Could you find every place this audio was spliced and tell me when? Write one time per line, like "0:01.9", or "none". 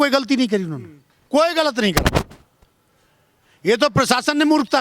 none